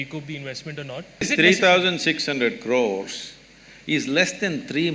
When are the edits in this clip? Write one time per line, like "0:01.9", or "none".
0:01.2